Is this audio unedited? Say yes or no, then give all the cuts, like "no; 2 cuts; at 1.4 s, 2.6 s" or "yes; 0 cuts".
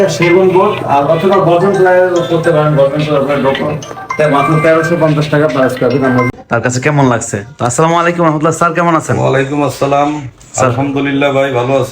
no; 1 cut; at 6.3 s